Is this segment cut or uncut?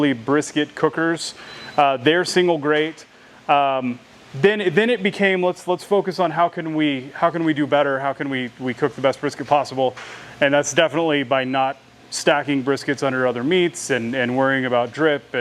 uncut